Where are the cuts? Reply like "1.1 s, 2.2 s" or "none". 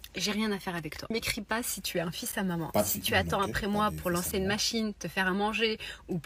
1.2 s